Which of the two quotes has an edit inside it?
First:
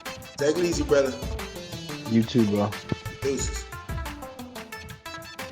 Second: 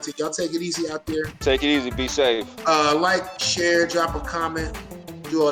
first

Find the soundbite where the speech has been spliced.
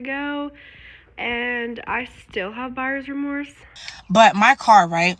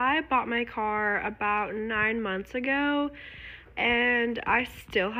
first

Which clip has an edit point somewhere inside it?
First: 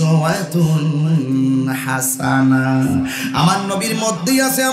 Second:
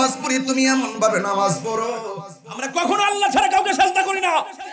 second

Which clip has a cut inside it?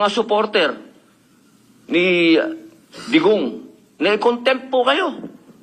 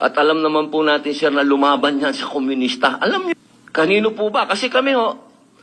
second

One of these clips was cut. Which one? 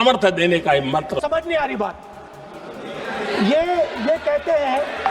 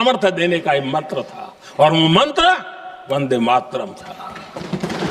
first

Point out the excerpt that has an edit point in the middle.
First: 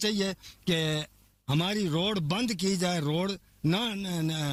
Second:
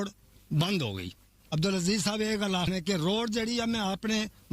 second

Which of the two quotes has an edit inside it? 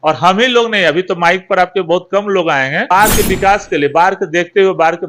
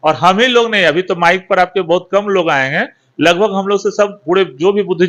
first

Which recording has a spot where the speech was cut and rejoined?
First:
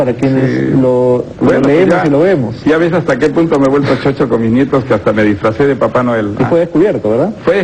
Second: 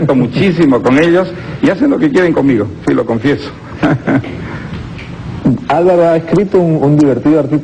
first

